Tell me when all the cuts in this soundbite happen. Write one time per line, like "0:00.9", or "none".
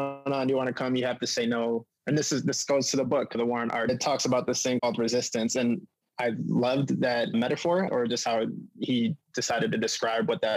0:07.9